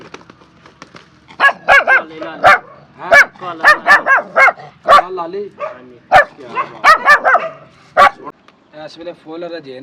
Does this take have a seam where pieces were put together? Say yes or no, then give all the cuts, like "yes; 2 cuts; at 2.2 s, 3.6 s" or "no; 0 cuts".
yes; 1 cut; at 8.2 s